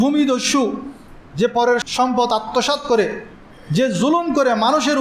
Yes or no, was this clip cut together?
yes